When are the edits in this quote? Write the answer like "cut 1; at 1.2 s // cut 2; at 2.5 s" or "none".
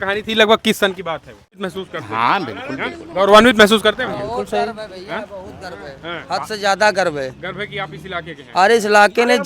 cut 1; at 1.5 s